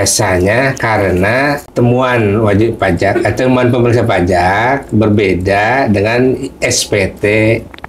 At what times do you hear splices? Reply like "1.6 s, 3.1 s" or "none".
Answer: 1.6 s